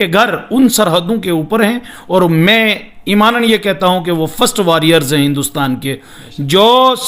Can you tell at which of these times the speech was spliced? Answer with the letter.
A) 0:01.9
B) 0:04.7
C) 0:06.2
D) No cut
D